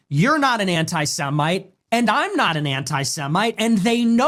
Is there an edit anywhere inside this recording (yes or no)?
no